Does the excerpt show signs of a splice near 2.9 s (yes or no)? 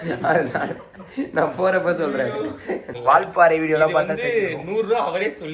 yes